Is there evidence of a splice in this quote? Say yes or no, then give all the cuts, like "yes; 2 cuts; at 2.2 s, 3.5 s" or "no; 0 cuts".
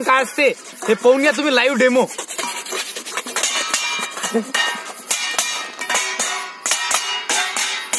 no; 0 cuts